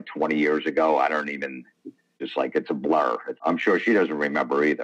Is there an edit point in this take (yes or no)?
yes